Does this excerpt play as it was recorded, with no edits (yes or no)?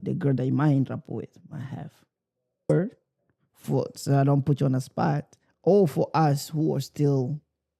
no